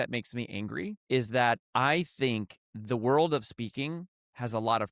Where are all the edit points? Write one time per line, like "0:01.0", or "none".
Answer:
0:01.0